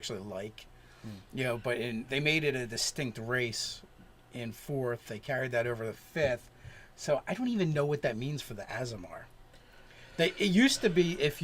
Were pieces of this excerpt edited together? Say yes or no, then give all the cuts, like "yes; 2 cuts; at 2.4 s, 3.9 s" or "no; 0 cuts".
yes; 1 cut; at 2.8 s